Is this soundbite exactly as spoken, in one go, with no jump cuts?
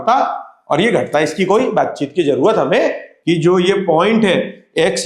no; 1 cut; at 3.1 s

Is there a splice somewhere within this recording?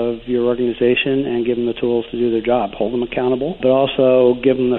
yes; 1 cut; at 3.6 s

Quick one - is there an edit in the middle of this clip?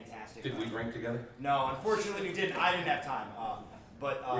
yes; 1 cut; at 2.3 s

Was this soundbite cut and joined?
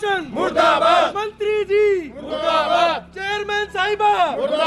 no; 0 cuts

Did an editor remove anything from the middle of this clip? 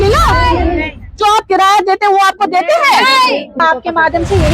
yes; 1 cut; at 3.6 s

